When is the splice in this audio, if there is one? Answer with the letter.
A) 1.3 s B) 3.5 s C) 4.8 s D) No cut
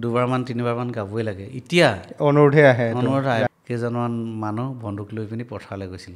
B